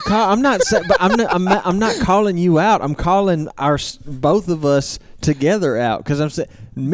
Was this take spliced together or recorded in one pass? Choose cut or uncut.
uncut